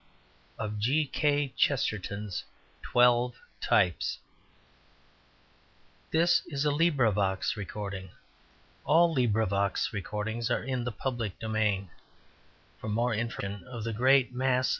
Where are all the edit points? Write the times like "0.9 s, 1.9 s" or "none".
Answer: none